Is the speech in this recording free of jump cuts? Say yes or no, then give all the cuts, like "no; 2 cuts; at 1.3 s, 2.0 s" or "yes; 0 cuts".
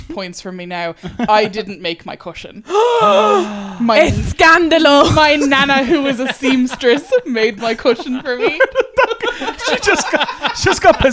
yes; 0 cuts